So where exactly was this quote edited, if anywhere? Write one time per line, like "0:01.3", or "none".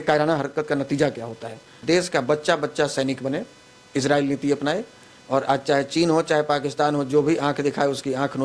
0:01.8